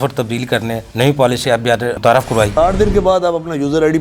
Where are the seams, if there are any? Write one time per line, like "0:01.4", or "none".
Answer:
0:02.2